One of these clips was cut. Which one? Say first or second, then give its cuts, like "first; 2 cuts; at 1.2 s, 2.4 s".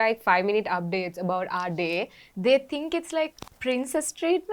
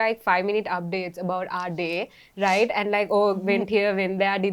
first; 1 cut; at 2.2 s